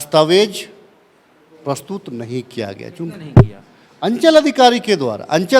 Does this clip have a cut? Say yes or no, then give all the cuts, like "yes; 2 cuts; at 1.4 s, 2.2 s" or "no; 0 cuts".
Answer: no; 0 cuts